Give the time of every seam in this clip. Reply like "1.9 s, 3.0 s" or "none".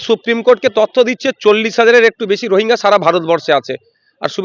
none